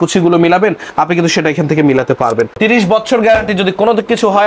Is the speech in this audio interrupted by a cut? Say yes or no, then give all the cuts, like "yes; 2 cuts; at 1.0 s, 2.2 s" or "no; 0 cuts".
yes; 1 cut; at 2.6 s